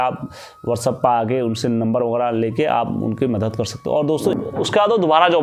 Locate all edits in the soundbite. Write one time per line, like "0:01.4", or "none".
0:04.3